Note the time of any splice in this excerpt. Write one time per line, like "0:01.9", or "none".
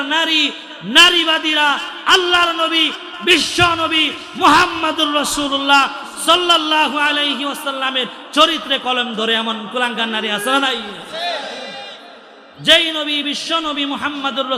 none